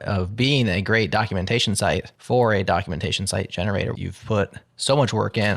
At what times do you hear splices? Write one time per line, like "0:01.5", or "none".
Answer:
0:02.1
0:04.0